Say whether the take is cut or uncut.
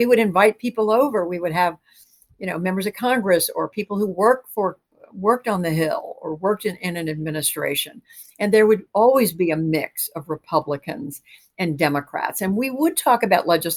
uncut